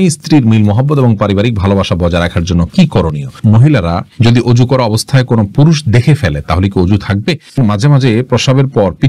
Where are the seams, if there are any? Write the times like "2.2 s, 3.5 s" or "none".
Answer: 3.4 s, 7.6 s